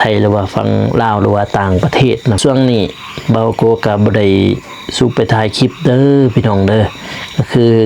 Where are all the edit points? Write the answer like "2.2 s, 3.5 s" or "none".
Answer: 2.4 s